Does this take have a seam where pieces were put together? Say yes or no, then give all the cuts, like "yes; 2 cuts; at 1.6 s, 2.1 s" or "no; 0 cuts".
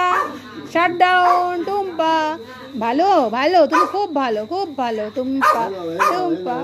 no; 0 cuts